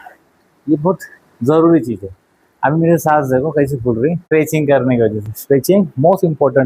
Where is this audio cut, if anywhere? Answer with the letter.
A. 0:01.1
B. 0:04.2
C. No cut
B